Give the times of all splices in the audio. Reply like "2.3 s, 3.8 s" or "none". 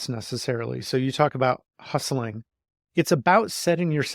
none